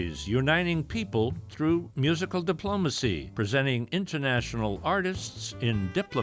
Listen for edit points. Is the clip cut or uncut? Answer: cut